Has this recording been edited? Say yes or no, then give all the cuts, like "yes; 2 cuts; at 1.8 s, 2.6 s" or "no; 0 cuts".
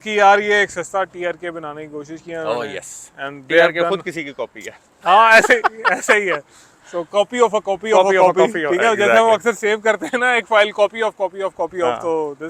no; 0 cuts